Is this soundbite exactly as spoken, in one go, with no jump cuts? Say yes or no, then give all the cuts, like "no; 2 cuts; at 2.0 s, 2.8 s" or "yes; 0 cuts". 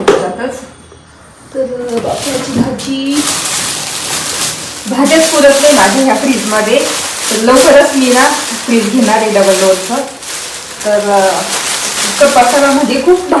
yes; 0 cuts